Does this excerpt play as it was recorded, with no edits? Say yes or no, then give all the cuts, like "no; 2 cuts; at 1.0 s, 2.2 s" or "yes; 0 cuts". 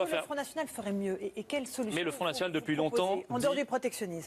no; 1 cut; at 1.2 s